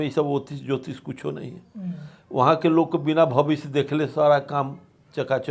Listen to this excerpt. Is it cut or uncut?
uncut